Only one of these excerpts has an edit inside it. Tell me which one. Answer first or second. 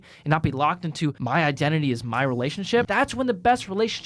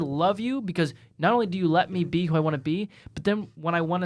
first